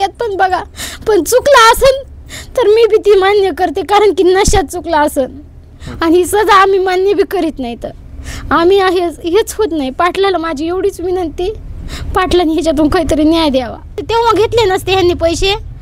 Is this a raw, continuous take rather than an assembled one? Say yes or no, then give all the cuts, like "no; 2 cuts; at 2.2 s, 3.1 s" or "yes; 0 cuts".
no; 2 cuts; at 5.8 s, 14.0 s